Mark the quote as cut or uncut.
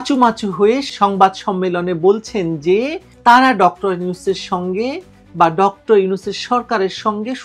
uncut